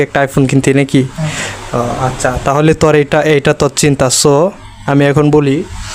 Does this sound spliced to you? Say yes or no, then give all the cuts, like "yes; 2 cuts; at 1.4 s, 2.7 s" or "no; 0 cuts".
no; 0 cuts